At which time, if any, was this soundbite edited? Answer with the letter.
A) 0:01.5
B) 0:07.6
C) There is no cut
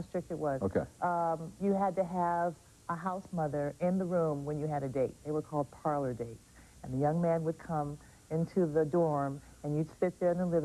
C